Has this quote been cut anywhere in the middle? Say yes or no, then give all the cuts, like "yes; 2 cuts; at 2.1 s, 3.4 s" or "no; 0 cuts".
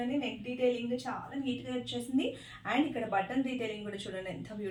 no; 0 cuts